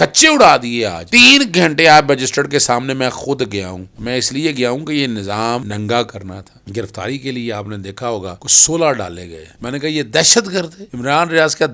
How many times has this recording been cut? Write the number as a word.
two